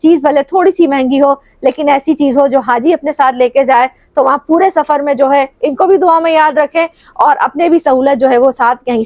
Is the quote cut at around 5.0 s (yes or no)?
no